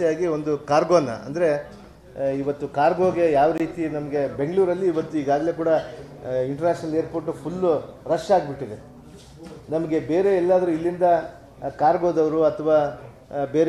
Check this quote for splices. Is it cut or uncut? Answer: uncut